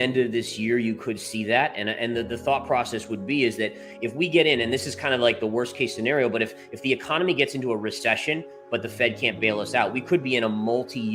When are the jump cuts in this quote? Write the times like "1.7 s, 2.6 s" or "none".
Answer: none

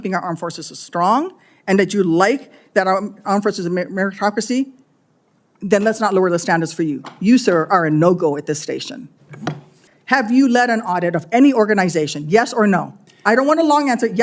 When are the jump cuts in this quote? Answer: 9.7 s

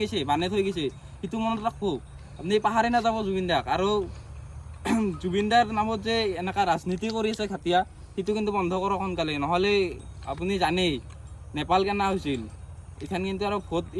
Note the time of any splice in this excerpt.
none

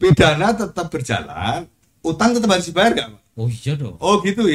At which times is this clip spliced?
none

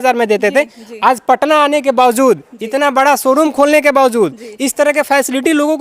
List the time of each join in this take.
none

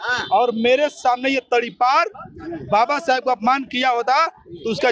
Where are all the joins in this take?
none

